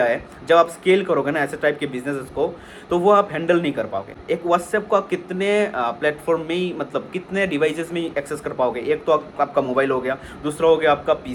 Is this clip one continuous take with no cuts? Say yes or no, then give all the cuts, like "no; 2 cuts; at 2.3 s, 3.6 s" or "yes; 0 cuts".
yes; 0 cuts